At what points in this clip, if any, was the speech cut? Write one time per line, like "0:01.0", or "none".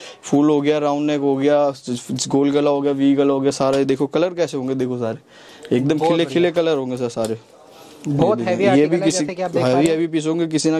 none